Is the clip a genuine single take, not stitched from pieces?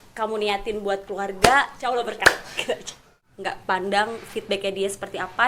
no; 2 cuts; at 2.0 s, 3.2 s

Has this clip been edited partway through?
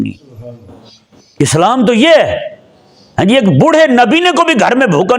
no; 0 cuts

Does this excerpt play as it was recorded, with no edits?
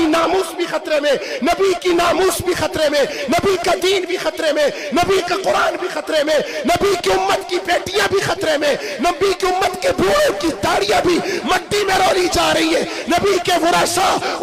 yes; 0 cuts

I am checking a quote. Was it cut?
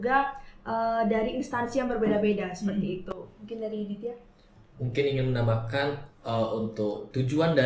no; 0 cuts

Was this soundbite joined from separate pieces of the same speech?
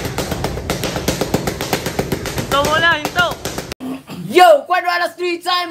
yes; 1 cut; at 3.7 s

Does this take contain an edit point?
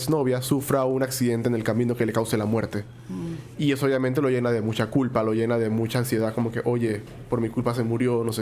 no; 0 cuts

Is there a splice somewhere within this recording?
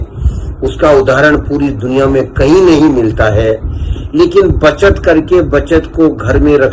no; 0 cuts

